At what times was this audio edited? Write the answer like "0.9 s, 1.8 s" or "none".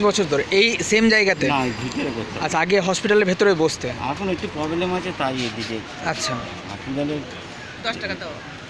none